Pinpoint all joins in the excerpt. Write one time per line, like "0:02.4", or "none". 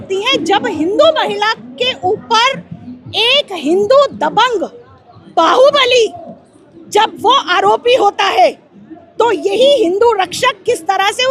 none